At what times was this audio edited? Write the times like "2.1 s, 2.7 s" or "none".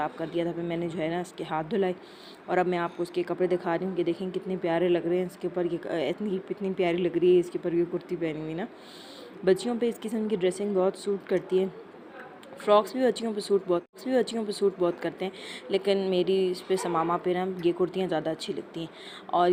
none